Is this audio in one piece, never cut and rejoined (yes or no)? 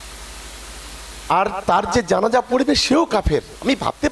yes